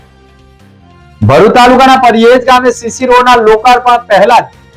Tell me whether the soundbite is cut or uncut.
cut